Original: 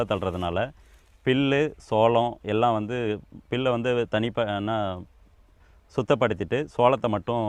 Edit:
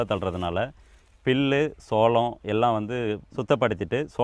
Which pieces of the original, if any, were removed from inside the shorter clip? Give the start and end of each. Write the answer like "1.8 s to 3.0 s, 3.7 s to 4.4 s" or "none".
3.3 s to 5.9 s